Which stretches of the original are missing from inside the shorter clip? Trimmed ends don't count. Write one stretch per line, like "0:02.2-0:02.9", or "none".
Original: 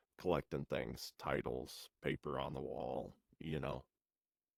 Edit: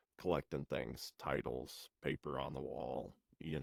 none

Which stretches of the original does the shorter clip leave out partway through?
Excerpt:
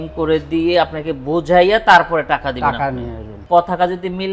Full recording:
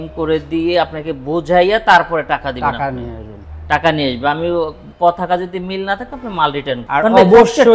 0:03.3-0:04.8

